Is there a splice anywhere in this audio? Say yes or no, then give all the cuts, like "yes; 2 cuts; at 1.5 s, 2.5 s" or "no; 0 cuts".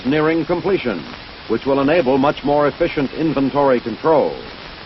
no; 0 cuts